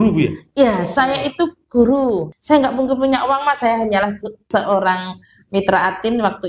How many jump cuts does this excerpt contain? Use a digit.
2